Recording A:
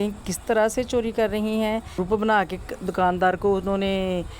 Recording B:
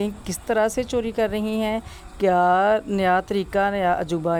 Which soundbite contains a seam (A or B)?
A